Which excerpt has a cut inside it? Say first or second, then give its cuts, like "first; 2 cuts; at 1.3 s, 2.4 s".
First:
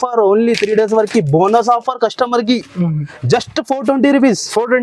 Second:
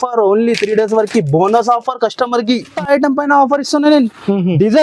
second; 1 cut; at 2.7 s